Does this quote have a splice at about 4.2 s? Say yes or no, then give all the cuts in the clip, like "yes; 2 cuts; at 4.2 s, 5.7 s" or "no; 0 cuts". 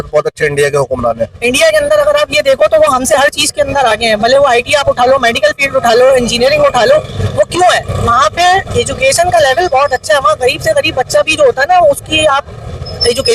no; 1 cut; at 1.3 s